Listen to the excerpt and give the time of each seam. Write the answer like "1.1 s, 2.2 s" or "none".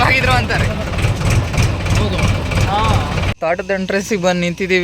3.3 s